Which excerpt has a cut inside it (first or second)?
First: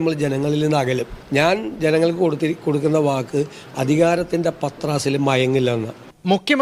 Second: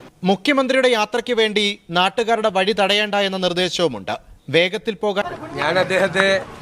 second